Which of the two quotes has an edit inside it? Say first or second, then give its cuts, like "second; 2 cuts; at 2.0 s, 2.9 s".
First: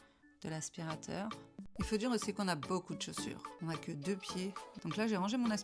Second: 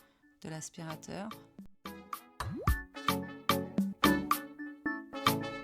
first; 3 cuts; at 1.7 s, 3.5 s, 4.7 s